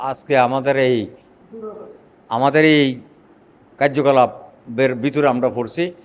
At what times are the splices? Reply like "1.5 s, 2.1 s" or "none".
none